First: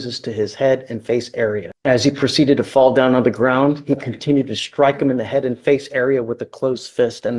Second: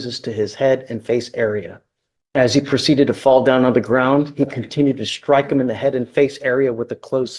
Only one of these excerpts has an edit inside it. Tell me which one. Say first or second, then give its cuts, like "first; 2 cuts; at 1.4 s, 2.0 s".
first; 1 cut; at 1.7 s